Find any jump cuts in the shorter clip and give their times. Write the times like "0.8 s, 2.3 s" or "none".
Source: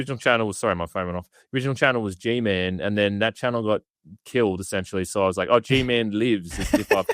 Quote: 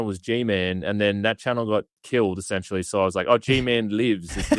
2.0 s